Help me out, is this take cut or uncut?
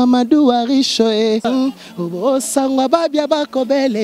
cut